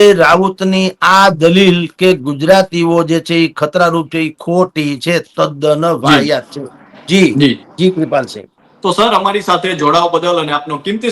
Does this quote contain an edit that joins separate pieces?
no; 0 cuts

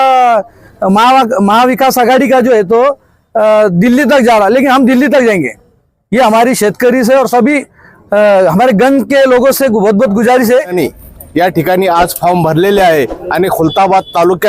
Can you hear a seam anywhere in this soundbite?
yes; 1 cut; at 10.7 s

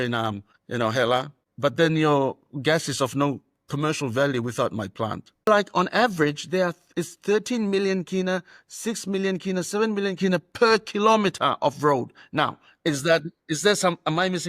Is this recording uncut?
no; 1 cut; at 5.4 s

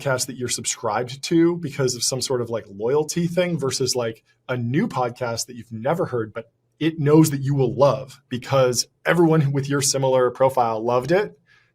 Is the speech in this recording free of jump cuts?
yes; 0 cuts

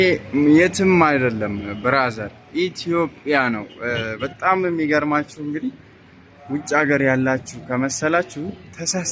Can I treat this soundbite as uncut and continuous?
yes; 0 cuts

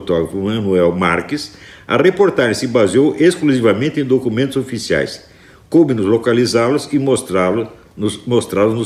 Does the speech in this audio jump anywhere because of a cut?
no; 0 cuts

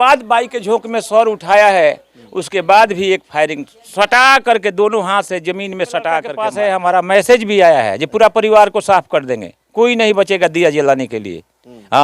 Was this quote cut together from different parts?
yes; 1 cut; at 6.4 s

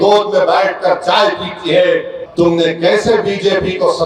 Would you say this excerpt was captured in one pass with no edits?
no; 1 cut; at 2.2 s

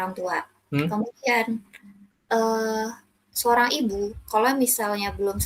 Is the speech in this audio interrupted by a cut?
no; 0 cuts

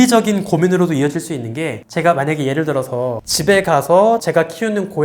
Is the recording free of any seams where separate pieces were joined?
yes; 0 cuts

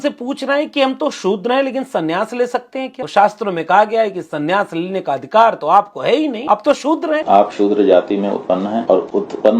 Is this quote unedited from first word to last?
no; 4 cuts; at 3.0 s, 6.4 s, 7.2 s, 8.8 s

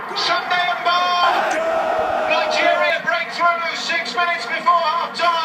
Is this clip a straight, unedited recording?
yes; 0 cuts

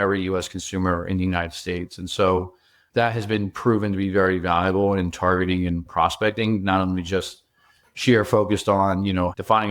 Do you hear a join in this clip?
yes; 1 cut; at 5.8 s

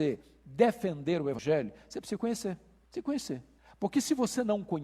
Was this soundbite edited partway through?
yes; 1 cut; at 1.4 s

